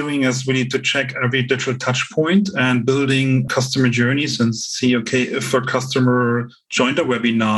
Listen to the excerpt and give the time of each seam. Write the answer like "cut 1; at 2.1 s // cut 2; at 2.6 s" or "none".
cut 1; at 3.5 s